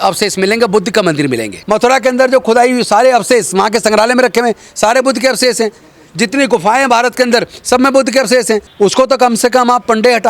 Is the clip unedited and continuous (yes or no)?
no